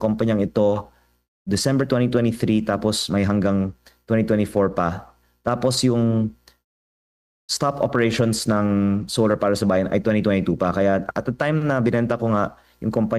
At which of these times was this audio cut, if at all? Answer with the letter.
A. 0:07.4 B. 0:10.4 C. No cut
C